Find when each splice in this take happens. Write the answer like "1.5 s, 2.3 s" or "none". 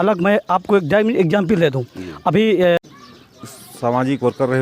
2.8 s